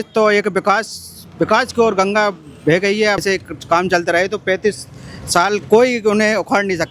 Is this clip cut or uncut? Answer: cut